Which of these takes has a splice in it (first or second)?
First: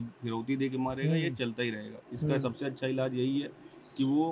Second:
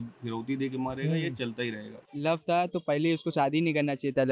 second